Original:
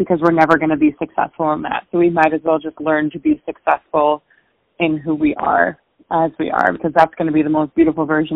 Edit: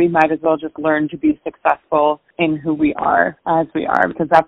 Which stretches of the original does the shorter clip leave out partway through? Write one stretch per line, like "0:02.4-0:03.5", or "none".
0:04.3-0:04.7
0:05.8-0:06.0

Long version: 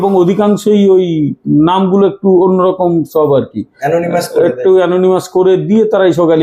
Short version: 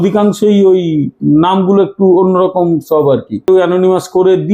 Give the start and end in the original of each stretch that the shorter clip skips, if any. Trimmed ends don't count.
0:03.7-0:04.7

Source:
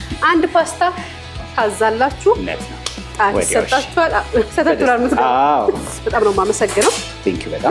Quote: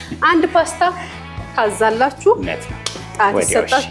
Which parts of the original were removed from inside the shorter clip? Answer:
none

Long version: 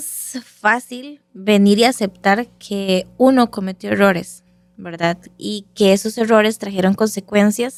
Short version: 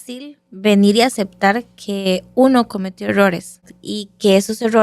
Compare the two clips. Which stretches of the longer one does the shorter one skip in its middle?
0:04.6-0:05.3

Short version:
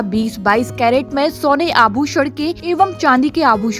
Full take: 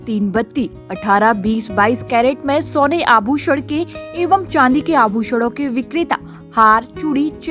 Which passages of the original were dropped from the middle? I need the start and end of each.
0:03.9-0:04.1

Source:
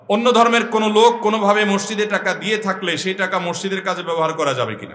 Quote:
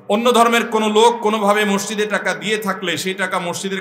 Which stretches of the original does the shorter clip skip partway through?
none

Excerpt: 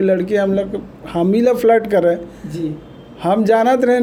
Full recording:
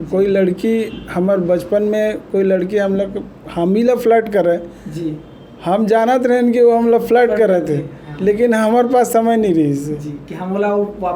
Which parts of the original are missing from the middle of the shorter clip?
none

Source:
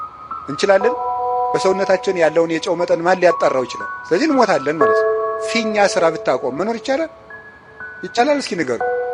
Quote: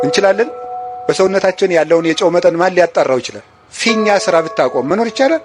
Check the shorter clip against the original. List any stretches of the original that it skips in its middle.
0:04.0-0:05.3

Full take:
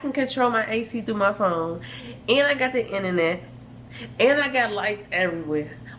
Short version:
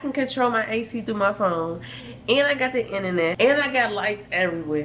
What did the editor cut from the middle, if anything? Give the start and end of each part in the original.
0:03.3-0:04.1

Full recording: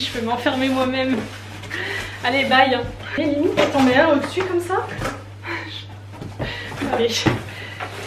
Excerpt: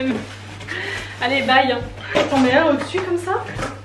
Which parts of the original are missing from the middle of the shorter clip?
0:03.1-0:03.5

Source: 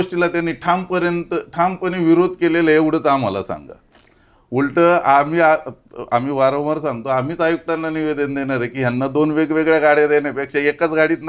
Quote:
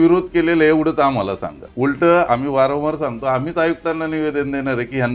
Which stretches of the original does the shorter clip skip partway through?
0:03.6-0:04.3
0:05.0-0:06.1

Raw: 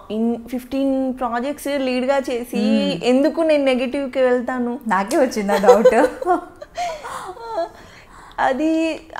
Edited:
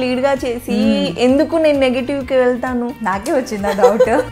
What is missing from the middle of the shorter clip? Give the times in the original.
none

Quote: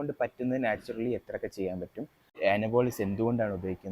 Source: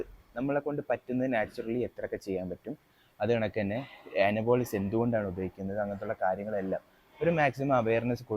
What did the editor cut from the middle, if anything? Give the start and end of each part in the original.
0:02.9-0:04.0

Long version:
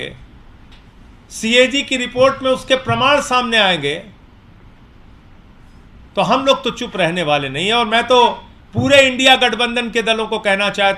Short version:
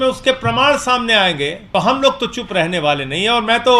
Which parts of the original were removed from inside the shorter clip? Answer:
0:04.0-0:06.0

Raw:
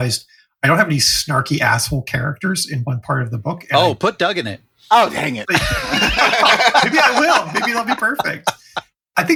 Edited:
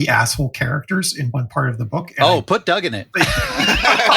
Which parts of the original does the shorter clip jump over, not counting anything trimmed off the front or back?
0:04.6-0:05.4

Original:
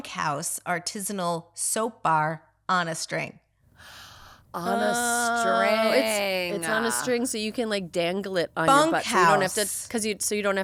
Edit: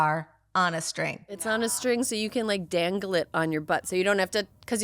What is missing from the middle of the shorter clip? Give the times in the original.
0:03.5-0:06.6

